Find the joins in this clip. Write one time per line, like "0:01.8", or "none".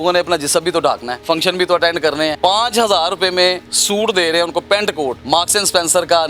0:01.1
0:02.4
0:03.7
0:05.2